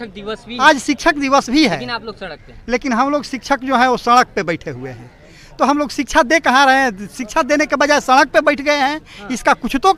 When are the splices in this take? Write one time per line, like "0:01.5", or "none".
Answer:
none

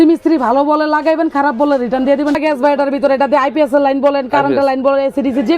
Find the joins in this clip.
0:02.4

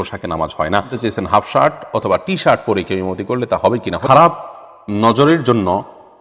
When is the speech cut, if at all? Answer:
0:00.9
0:04.0

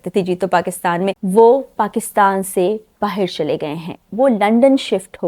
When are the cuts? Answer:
0:01.2

